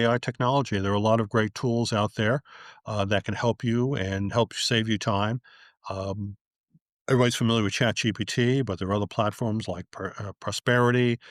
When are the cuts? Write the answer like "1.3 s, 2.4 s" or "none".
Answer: none